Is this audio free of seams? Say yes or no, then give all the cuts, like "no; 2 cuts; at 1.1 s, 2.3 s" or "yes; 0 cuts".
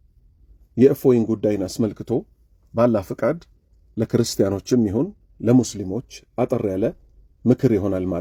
yes; 0 cuts